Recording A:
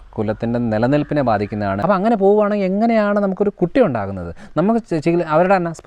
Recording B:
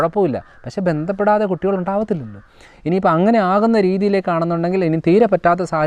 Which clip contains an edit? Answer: A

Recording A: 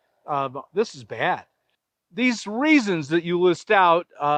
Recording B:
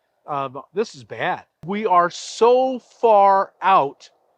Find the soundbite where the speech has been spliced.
B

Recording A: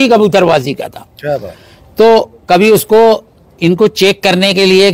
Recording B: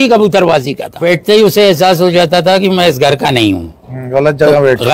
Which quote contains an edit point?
B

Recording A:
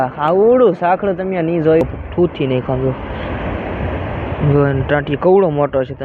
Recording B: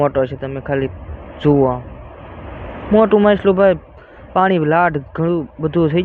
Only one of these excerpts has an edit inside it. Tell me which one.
A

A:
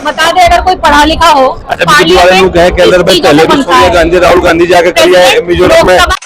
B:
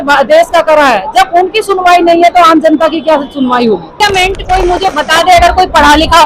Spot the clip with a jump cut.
B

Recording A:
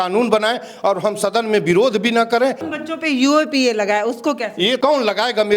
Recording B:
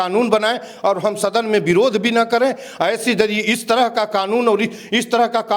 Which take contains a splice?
A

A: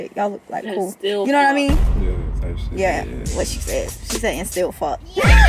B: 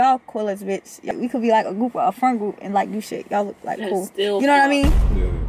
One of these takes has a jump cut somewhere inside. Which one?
B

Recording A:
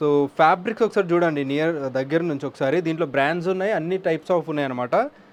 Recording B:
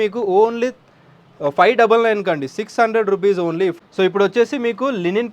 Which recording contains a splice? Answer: B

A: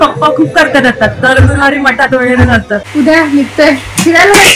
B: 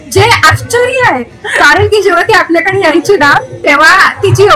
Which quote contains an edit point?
A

